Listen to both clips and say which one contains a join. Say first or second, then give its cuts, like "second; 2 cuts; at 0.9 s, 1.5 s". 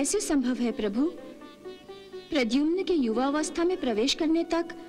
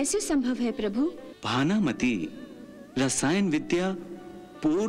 second; 1 cut; at 1.3 s